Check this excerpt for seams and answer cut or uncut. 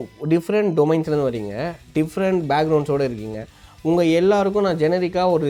uncut